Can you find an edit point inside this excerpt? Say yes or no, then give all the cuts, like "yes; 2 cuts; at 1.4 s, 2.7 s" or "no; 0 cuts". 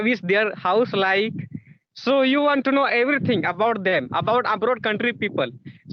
no; 0 cuts